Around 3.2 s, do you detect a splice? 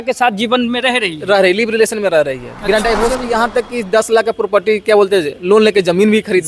yes; 1 cut; at 3.2 s

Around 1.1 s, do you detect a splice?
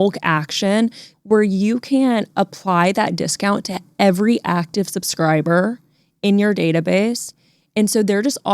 yes; 1 cut; at 1.1 s

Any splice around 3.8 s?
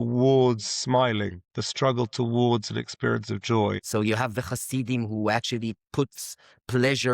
yes; 1 cut; at 3.8 s

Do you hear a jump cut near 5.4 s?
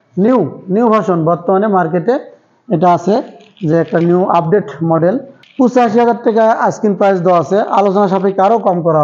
yes; 1 cut; at 5.4 s

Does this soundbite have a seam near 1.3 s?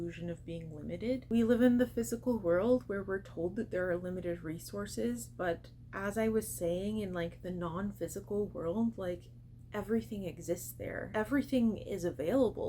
yes; 2 cuts; at 1.3 s, 11.1 s

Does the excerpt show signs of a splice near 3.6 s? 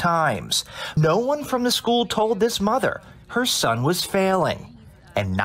no; 1 cut; at 1.0 s

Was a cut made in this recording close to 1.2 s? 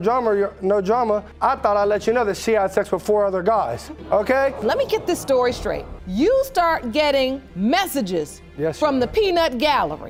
no; 0 cuts

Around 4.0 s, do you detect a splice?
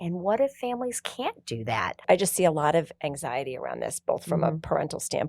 no; 1 cut; at 2.0 s

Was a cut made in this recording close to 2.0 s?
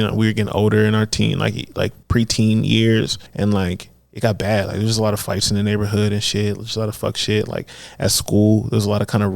yes; 2 cuts; at 2.0 s, 3.2 s

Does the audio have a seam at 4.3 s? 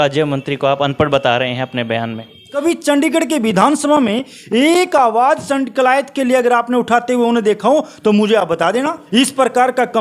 no; 2 cuts; at 2.6 s, 9.0 s

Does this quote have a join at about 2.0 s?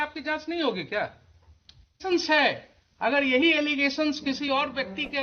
yes; 1 cut; at 2.0 s

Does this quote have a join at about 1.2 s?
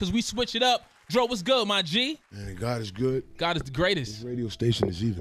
yes; 1 cut; at 1.2 s

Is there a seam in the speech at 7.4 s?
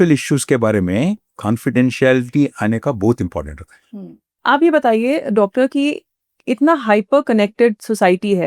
no; 2 cuts; at 1.3 s, 4.4 s

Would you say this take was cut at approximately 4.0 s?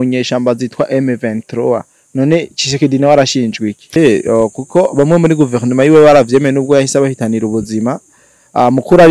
yes; 1 cut; at 4.0 s

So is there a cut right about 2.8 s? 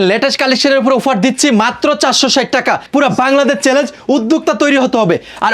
yes; 1 cut; at 2.8 s

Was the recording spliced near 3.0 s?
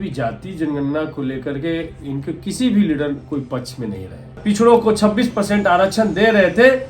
no; 1 cut; at 4.4 s

